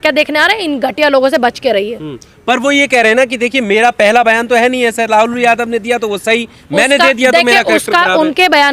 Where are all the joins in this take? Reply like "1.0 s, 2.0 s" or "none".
none